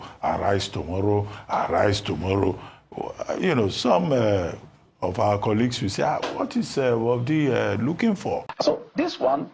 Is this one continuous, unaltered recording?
no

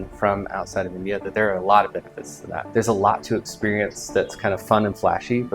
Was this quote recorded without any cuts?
no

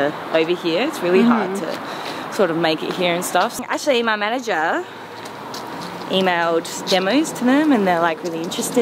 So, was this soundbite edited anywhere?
yes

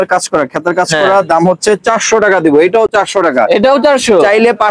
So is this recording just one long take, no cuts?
yes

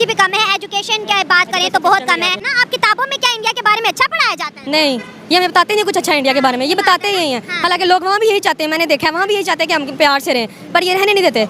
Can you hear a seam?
yes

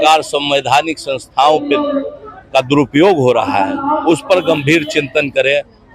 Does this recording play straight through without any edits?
yes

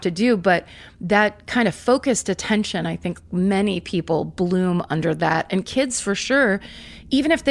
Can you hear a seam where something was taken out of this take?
no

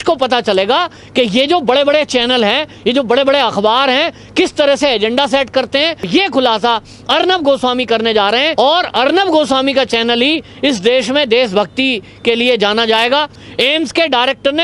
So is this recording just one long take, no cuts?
no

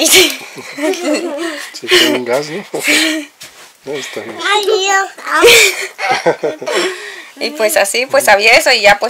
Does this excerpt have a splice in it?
no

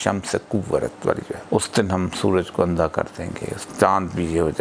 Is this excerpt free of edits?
no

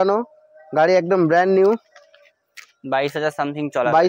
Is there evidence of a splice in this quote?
no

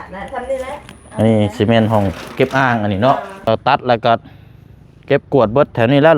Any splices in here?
yes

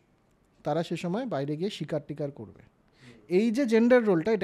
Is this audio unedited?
yes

